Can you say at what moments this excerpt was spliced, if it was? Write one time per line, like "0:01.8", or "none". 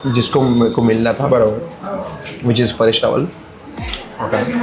none